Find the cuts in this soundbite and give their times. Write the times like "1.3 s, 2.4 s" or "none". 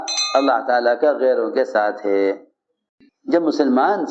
2.7 s